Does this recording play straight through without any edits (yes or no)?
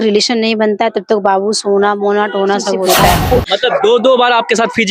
no